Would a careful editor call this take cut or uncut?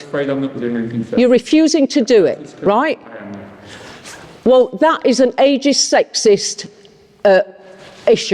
uncut